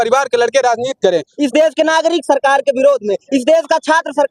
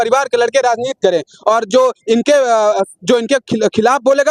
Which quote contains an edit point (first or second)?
first